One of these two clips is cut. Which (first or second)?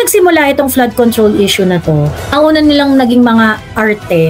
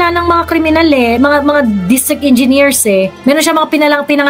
first